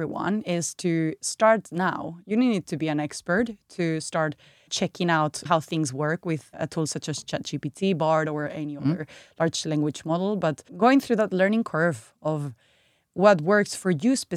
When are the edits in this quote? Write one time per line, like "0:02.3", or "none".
0:06.5
0:10.7